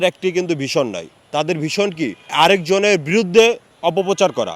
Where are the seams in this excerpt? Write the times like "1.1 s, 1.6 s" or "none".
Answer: 2.2 s